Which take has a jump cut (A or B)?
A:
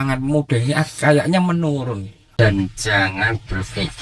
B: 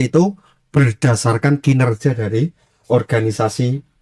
A